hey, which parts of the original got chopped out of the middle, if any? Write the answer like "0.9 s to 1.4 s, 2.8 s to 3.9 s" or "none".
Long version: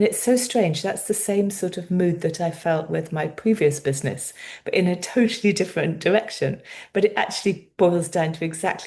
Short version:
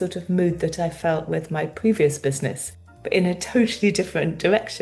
none